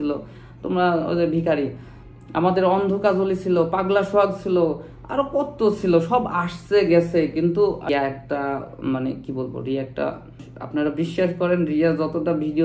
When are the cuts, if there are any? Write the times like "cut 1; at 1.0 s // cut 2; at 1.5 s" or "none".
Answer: cut 1; at 7.9 s // cut 2; at 10.5 s